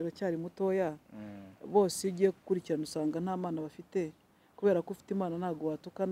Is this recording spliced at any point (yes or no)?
no